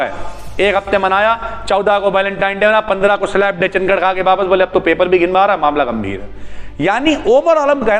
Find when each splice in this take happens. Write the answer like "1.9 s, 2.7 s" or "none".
none